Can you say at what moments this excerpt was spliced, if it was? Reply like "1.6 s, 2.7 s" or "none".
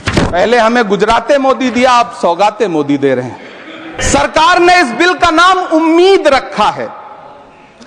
4.0 s